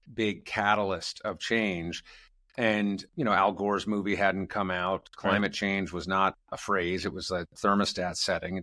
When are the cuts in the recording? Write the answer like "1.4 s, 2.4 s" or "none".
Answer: 3.1 s